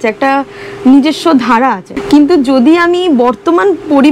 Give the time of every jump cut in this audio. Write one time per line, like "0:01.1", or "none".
0:01.9